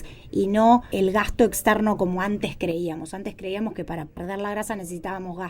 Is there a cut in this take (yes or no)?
yes